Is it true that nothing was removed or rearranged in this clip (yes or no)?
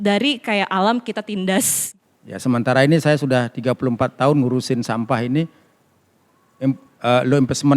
no